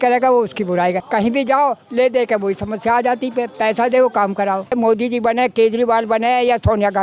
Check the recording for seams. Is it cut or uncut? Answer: cut